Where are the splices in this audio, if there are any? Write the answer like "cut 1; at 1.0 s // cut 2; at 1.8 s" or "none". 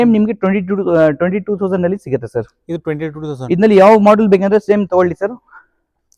none